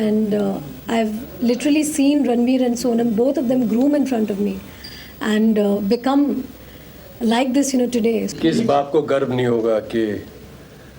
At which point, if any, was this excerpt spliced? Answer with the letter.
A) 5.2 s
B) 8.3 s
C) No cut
C